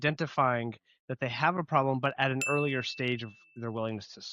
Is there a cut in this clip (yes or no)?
no